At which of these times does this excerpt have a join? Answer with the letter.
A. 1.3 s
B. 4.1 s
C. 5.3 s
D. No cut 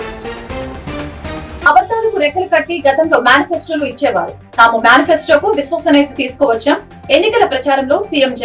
A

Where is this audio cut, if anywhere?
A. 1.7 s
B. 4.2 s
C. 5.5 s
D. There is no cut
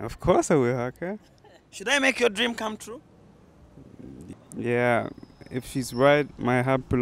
B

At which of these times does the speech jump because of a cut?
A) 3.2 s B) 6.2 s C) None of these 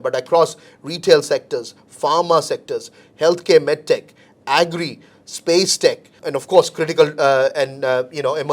B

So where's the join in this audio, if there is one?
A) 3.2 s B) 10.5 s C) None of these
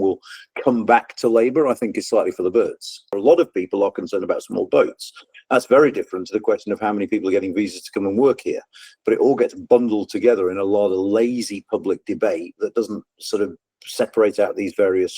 A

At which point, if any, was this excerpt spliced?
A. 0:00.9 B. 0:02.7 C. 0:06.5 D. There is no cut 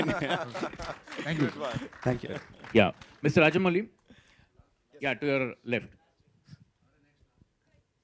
D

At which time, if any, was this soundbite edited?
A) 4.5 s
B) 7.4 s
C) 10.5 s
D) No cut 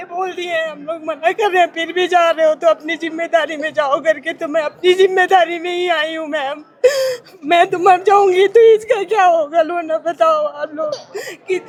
D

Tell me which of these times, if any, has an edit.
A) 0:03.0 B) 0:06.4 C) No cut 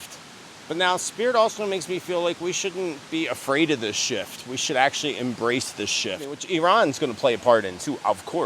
B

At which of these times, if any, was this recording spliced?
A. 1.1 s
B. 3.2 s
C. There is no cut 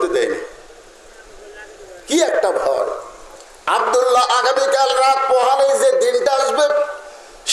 B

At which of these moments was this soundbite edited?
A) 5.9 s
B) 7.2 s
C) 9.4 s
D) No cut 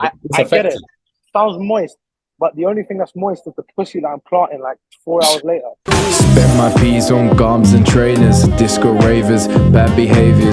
A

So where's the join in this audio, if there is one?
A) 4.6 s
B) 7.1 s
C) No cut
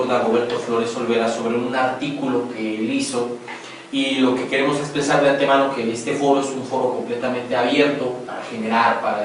A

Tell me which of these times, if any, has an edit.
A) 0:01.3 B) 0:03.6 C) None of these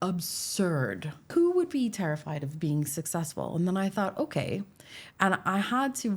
A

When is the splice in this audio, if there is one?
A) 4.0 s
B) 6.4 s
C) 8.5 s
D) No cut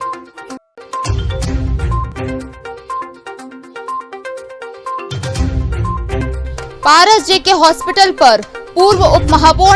B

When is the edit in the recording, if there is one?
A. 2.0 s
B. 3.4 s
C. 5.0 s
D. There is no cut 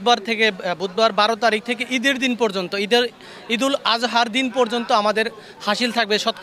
D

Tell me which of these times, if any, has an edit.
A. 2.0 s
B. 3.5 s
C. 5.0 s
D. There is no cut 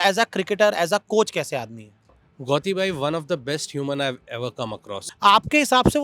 C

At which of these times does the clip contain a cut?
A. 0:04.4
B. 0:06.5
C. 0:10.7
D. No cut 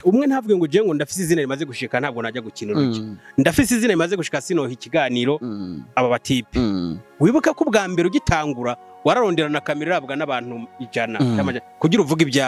D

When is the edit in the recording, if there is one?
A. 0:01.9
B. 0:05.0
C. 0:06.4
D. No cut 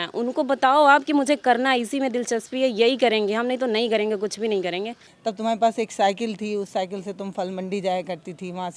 B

